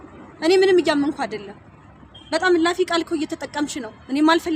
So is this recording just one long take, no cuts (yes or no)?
yes